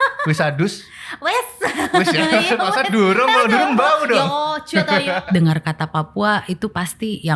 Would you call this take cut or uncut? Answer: cut